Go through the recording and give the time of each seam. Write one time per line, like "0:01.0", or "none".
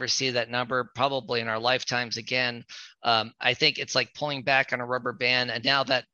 none